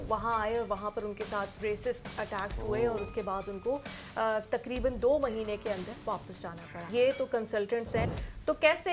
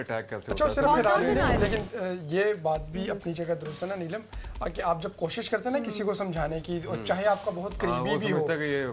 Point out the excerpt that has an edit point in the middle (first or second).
first